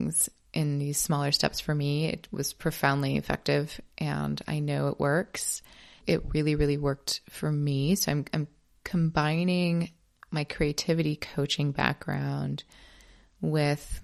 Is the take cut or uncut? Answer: uncut